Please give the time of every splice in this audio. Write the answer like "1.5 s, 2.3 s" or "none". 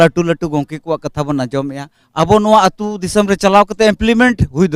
none